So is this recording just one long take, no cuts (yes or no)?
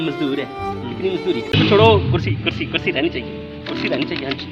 no